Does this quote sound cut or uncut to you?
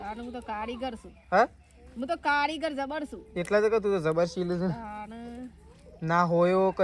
uncut